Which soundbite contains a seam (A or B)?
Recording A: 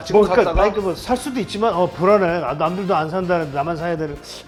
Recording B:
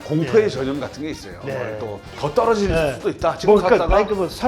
B